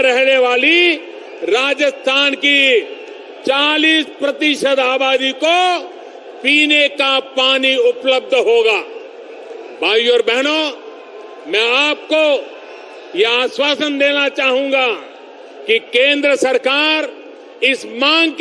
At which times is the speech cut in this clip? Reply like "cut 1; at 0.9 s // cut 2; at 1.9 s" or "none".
none